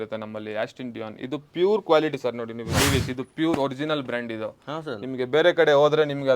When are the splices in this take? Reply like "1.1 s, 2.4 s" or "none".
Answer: 2.6 s